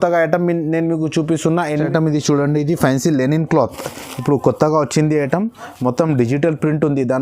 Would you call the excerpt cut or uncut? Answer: cut